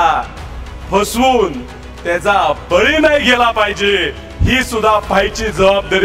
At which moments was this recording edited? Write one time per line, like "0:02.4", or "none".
none